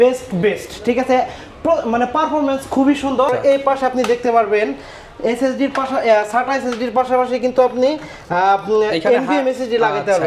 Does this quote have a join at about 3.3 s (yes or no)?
yes